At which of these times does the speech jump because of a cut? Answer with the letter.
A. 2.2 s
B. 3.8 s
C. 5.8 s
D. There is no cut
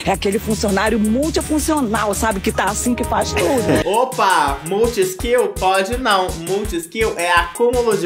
B